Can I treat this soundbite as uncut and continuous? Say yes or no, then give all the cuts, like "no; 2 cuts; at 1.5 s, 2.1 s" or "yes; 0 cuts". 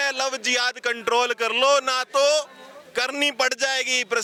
yes; 0 cuts